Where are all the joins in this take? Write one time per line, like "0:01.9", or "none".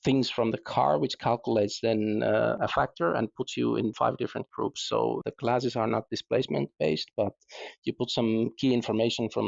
none